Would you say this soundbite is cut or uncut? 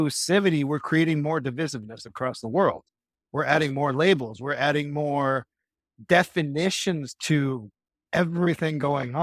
uncut